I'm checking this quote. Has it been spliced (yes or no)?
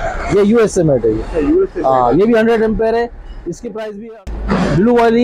yes